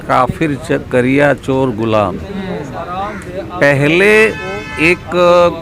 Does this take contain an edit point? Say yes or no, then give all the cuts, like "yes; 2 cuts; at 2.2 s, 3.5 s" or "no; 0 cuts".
no; 0 cuts